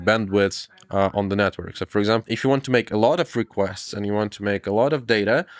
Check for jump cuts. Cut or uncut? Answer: uncut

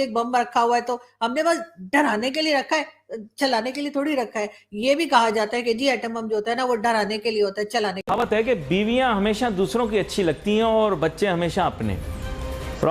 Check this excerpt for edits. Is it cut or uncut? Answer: cut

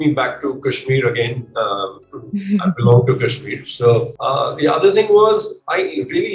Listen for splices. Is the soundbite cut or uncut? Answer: cut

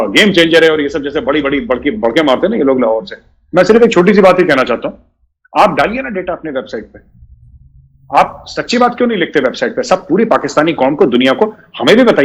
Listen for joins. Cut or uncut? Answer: uncut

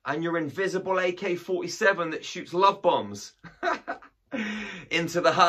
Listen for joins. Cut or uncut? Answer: uncut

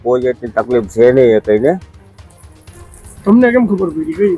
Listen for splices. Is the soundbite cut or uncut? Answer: uncut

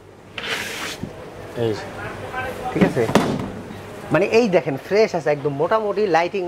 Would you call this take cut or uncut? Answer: uncut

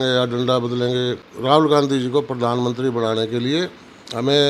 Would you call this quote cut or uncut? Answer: cut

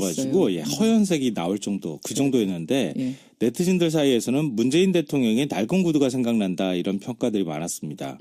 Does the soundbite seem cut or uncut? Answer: cut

